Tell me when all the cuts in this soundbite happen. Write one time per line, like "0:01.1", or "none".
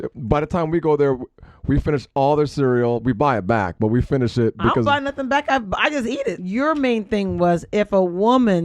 0:06.4